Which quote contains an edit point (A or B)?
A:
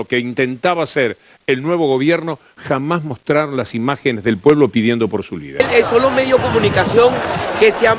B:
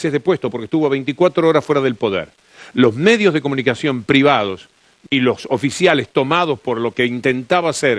A